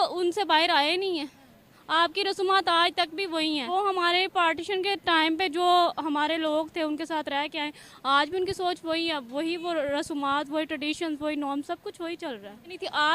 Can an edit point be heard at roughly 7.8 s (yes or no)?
no